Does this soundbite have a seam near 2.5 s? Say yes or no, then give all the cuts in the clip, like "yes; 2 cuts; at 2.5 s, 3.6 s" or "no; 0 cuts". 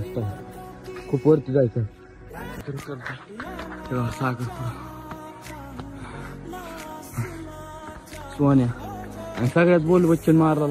yes; 1 cut; at 2.5 s